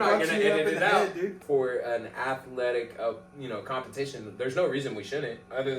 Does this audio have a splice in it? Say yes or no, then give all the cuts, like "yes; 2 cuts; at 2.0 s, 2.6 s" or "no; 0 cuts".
yes; 1 cut; at 1.4 s